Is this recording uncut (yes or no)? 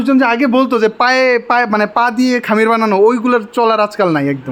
yes